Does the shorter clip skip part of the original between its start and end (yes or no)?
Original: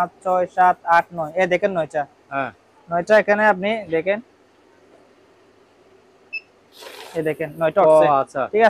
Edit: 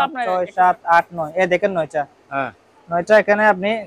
no